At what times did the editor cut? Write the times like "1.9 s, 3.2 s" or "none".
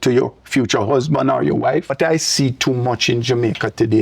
1.9 s